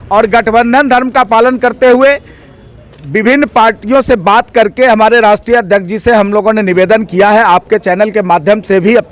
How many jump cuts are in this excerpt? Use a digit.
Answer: 0